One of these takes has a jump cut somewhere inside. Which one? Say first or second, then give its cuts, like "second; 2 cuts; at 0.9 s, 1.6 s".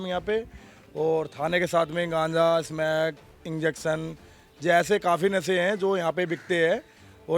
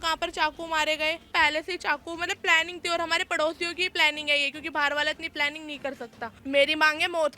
second; 2 cuts; at 1.3 s, 6.3 s